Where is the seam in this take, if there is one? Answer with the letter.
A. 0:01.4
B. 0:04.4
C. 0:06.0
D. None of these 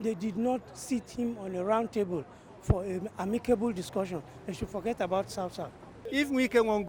C